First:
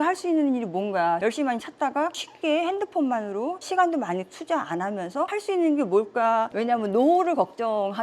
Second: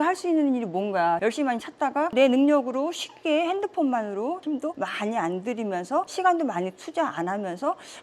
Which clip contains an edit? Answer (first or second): first